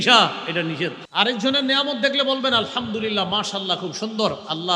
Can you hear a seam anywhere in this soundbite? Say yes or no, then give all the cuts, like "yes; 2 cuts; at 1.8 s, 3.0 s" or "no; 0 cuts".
yes; 1 cut; at 1.0 s